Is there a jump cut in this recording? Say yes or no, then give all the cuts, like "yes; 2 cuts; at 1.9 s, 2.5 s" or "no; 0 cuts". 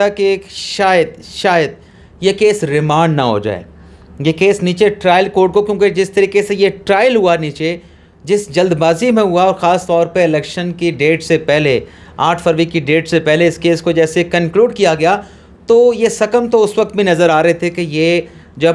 no; 0 cuts